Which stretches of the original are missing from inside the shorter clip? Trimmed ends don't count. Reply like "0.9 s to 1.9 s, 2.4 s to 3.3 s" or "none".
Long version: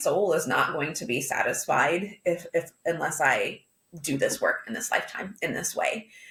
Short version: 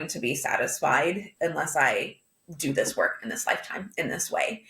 2.1 s to 2.7 s